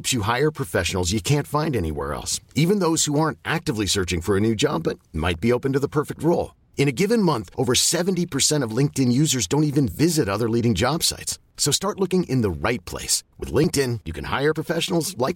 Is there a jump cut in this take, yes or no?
no